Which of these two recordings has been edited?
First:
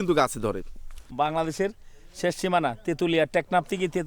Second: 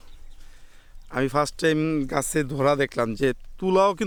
first; 1 cut; at 1.0 s

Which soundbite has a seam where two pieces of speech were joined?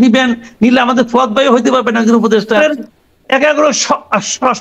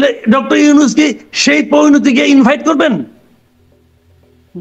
first; 1 cut; at 2.6 s

